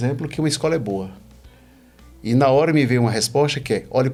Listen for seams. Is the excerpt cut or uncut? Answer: uncut